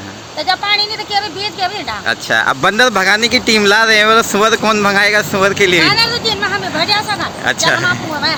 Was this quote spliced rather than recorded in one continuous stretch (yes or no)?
no